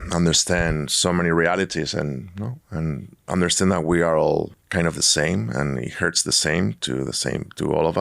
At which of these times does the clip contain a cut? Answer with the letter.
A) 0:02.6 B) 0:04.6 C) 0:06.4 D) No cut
B